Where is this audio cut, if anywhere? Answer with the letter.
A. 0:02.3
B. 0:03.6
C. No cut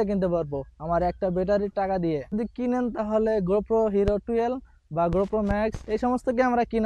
A